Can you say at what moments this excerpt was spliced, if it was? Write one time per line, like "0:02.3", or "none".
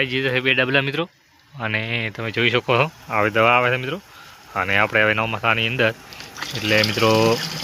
none